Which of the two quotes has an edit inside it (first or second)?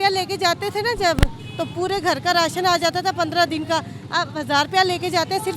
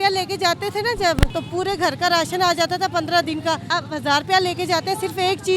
second